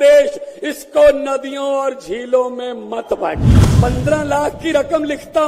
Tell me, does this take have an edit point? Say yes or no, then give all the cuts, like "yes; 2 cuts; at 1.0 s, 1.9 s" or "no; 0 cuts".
yes; 1 cut; at 3.6 s